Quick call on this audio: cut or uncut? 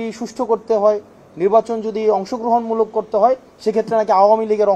uncut